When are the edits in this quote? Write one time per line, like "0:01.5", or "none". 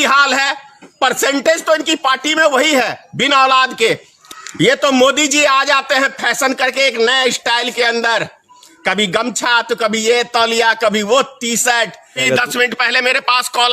0:04.1
0:12.2